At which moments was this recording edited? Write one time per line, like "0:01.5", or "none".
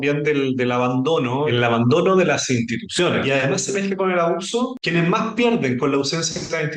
0:01.5
0:03.2
0:04.8